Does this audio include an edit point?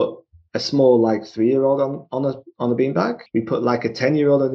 yes; 1 cut; at 3.2 s

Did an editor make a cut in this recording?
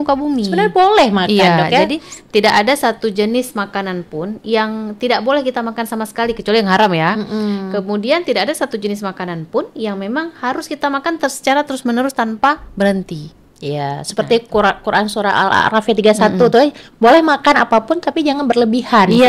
no; 0 cuts

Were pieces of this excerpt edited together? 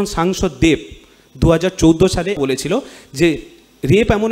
yes; 1 cut; at 2.4 s

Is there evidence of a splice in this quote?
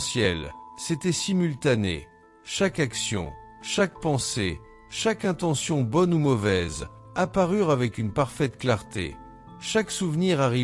no; 0 cuts

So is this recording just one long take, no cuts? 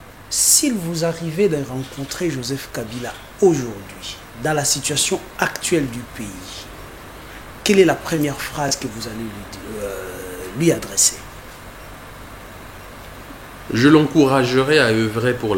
yes; 0 cuts

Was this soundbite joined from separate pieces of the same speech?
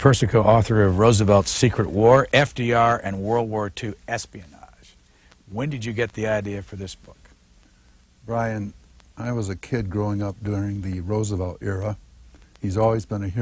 no; 0 cuts

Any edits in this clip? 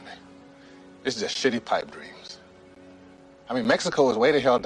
yes; 1 cut; at 2.8 s

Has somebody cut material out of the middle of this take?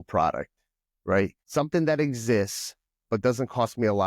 yes; 1 cut; at 1.4 s

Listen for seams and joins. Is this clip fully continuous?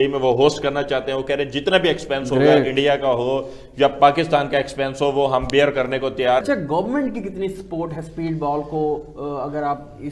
no; 1 cut; at 6.4 s

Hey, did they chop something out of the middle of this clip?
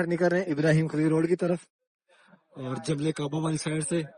no; 0 cuts

